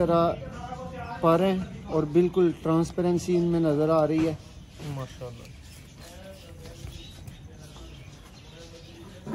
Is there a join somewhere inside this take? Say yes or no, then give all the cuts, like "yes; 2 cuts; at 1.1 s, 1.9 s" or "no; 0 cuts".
no; 0 cuts